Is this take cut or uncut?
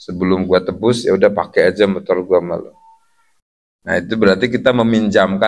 uncut